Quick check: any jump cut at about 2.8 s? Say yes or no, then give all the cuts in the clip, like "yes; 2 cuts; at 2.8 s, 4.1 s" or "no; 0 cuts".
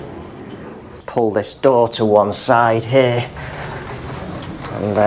no; 1 cut; at 1.0 s